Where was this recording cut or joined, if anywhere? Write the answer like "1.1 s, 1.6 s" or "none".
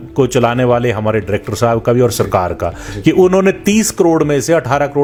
none